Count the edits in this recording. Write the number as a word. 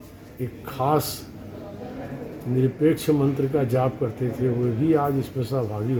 zero